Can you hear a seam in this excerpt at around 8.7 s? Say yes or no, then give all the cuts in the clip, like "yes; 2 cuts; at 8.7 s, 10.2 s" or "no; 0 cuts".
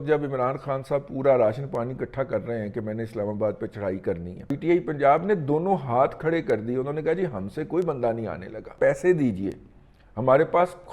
yes; 2 cuts; at 4.5 s, 8.7 s